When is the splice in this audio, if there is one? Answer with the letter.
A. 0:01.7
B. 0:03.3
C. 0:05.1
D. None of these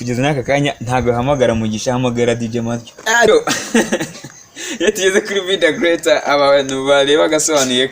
B